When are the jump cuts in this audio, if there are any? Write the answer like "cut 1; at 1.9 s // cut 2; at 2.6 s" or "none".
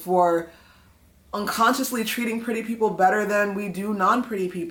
none